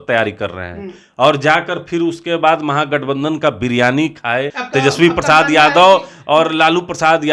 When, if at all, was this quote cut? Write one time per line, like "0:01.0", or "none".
0:04.6